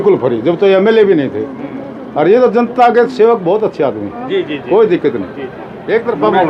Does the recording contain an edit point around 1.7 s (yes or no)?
no